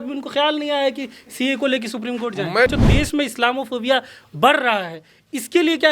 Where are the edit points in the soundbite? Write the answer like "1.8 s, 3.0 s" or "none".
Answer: 2.7 s